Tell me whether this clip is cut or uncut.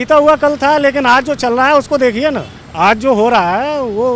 uncut